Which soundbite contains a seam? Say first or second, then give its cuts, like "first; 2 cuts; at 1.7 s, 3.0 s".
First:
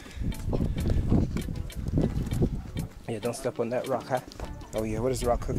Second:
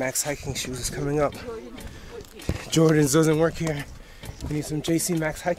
first; 1 cut; at 4.5 s